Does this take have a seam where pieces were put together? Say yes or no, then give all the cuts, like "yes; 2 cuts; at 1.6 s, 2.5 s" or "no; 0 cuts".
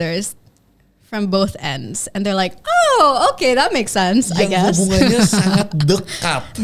no; 0 cuts